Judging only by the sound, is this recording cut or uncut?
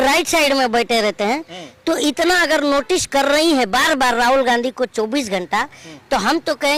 uncut